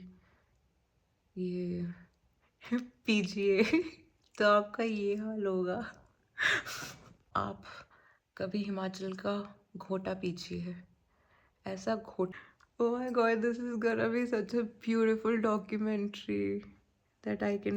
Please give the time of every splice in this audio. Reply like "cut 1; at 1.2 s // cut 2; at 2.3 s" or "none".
cut 1; at 7.3 s // cut 2; at 12.3 s